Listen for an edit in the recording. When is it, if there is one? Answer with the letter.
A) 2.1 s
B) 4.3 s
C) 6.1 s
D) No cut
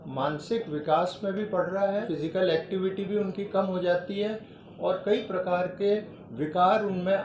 A